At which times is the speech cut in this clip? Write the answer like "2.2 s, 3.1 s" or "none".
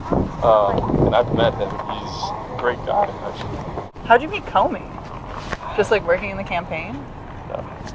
none